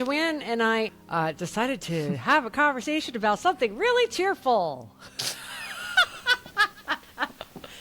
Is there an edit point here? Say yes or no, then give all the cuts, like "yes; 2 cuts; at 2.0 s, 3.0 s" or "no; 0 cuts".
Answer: yes; 1 cut; at 0.9 s